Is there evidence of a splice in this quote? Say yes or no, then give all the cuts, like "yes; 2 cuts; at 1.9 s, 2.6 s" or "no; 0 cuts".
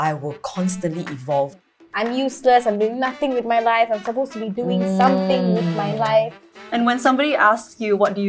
yes; 2 cuts; at 1.6 s, 6.5 s